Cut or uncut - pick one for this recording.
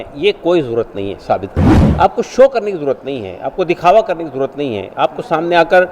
cut